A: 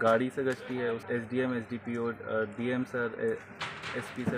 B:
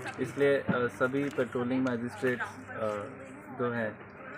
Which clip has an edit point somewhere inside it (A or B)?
A